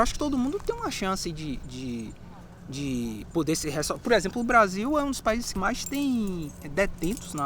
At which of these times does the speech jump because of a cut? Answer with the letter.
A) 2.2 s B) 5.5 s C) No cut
B